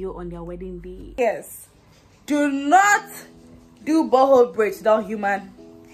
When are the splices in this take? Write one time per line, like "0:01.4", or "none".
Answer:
0:01.0